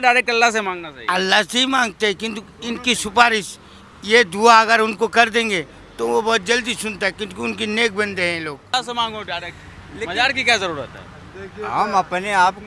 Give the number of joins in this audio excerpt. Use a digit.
1